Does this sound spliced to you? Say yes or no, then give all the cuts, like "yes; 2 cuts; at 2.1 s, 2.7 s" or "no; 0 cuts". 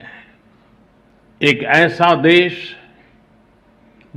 yes; 1 cut; at 1.1 s